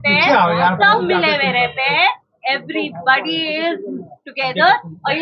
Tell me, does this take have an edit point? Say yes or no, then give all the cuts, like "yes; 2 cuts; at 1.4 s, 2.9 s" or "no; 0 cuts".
no; 0 cuts